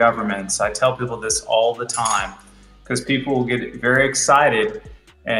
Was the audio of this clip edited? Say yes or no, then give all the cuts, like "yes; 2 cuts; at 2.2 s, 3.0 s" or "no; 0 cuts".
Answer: no; 0 cuts